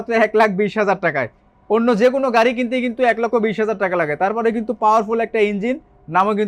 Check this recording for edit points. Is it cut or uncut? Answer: uncut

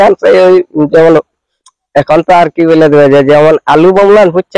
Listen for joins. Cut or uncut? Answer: uncut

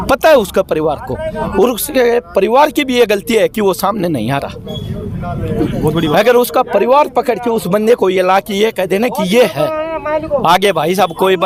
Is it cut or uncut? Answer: uncut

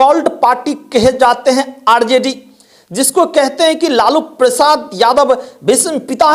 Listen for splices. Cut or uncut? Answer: uncut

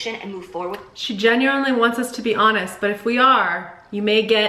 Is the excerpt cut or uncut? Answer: uncut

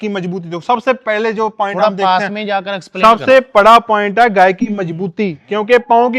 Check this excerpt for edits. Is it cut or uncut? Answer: uncut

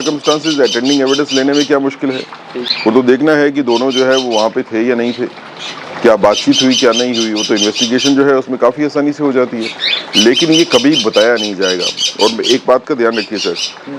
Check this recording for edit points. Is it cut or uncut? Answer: uncut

